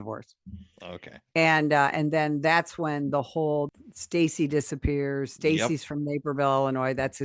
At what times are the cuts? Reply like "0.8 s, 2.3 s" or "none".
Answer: 3.7 s